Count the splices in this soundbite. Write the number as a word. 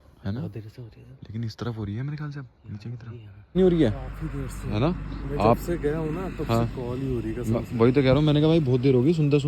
one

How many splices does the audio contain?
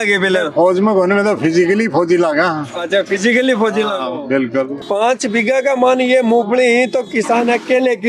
one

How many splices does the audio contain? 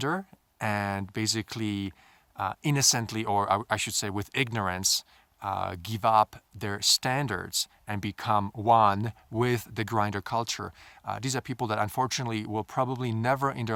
zero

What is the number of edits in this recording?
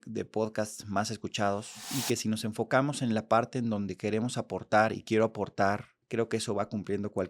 two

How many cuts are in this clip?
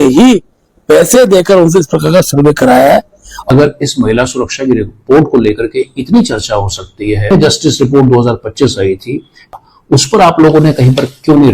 three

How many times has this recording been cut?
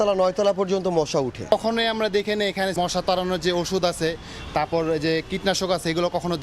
two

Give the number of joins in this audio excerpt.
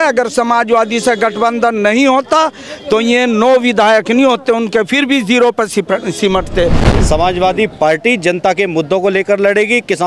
one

